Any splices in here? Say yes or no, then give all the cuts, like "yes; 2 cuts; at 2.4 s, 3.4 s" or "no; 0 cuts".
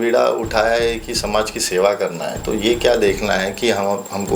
no; 0 cuts